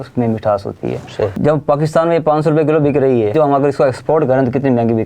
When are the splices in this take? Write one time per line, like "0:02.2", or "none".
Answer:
0:01.3
0:03.3

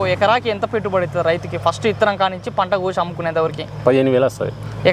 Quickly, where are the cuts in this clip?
none

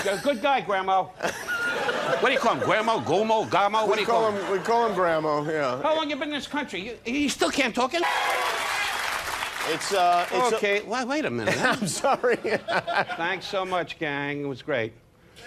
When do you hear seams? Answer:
none

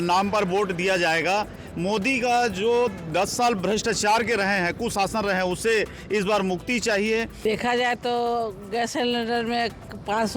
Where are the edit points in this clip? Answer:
0:07.4

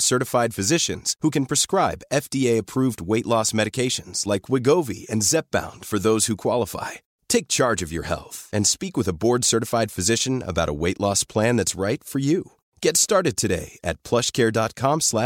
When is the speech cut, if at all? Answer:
none

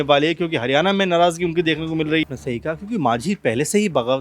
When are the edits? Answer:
0:02.3

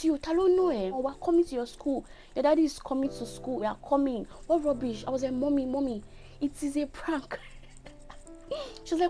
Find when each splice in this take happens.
0:01.0
0:03.6

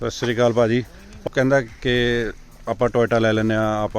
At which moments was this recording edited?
0:01.2

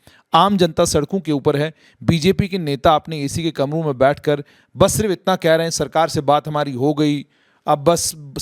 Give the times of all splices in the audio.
none

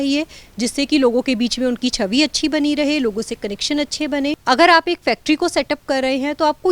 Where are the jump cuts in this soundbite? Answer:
0:04.4

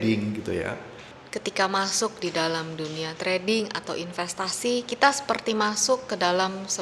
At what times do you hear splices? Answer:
0:01.1

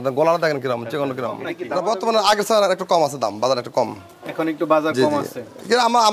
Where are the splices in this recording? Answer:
0:01.6

